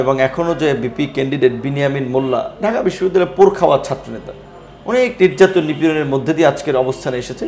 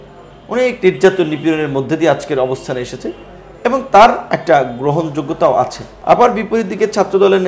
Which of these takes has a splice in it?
second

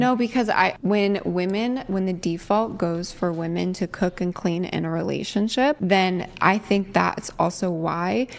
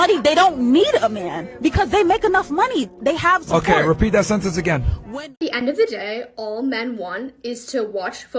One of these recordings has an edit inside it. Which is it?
second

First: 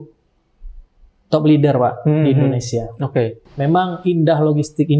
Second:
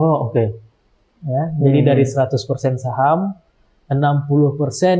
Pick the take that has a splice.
first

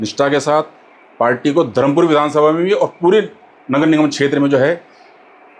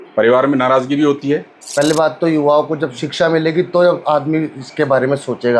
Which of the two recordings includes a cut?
second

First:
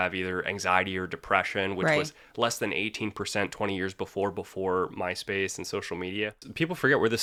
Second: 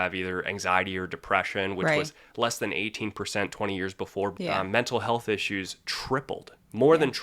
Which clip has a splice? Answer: second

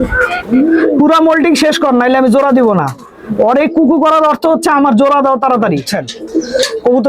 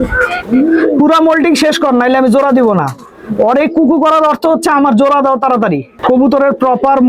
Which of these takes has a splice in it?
first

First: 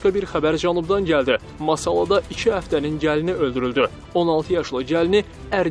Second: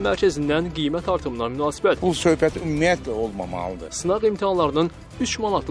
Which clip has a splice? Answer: second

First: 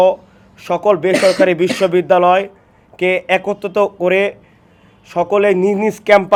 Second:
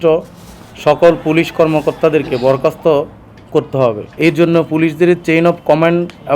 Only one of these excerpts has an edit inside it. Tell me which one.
second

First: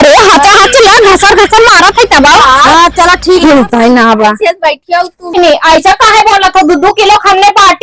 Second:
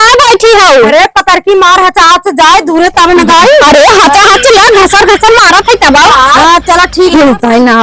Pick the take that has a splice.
first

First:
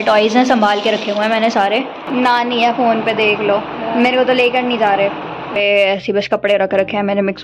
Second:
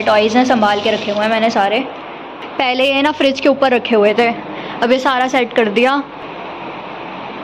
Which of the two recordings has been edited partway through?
first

